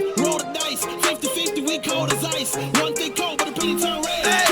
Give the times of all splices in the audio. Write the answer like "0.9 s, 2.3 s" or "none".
1.6 s